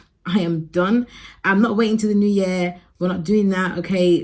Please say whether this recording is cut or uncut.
uncut